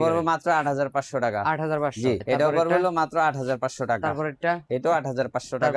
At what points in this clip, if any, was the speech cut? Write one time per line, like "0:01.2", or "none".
none

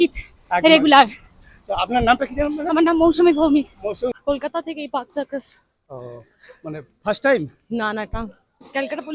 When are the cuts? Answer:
0:04.1

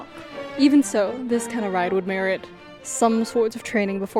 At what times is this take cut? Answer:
none

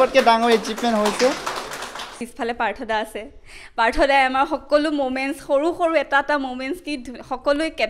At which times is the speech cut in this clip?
0:02.2

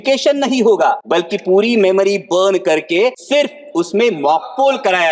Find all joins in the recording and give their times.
0:01.0
0:03.2

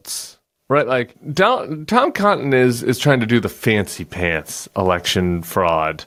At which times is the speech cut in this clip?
none

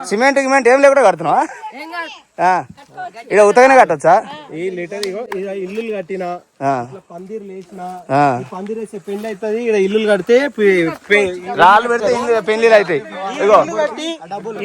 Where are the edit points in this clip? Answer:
none

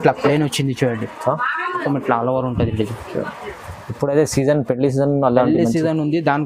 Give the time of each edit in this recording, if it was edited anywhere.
0:01.8

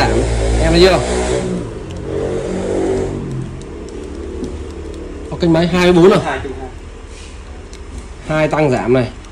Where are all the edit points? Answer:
none

